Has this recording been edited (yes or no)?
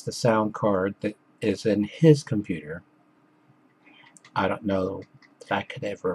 yes